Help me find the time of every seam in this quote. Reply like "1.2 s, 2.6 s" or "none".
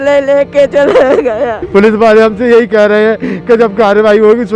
1.6 s